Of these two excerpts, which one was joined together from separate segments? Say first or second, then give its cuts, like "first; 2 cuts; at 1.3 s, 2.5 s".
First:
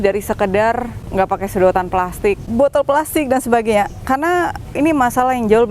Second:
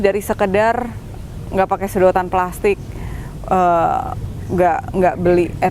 first; 3 cuts; at 1.0 s, 2.4 s, 4.8 s